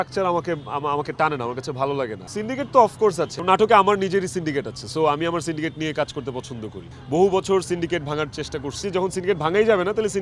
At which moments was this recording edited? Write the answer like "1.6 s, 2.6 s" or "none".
2.2 s, 3.4 s, 6.9 s, 8.8 s